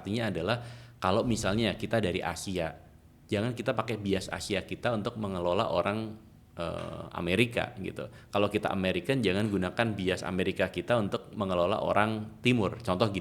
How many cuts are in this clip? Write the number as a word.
zero